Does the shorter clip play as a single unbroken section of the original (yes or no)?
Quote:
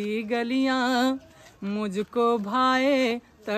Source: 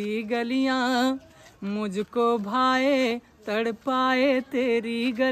yes